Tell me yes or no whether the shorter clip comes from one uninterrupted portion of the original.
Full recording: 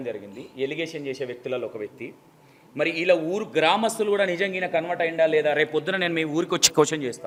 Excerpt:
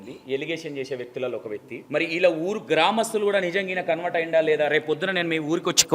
no